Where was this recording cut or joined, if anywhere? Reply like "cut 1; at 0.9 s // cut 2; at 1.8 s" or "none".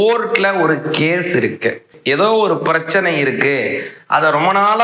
cut 1; at 2.0 s

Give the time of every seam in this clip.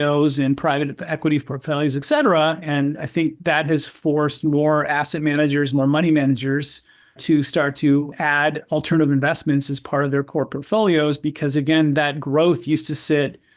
none

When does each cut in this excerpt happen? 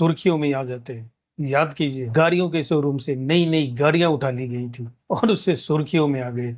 cut 1; at 2.1 s

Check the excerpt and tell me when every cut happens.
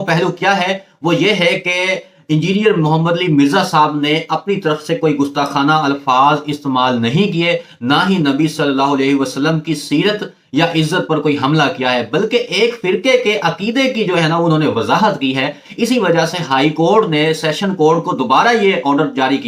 none

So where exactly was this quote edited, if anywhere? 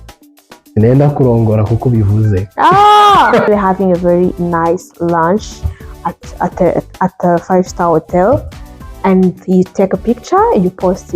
cut 1; at 3.5 s

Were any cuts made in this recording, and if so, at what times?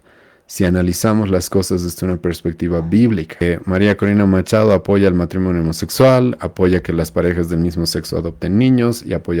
cut 1; at 3.4 s

